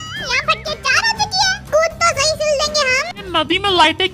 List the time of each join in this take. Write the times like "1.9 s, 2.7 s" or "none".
3.1 s